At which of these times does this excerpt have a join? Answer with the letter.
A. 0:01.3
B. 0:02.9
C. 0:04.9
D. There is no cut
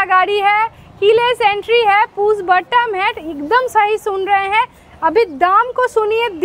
D